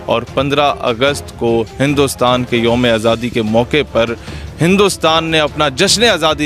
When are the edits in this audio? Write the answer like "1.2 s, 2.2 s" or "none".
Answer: none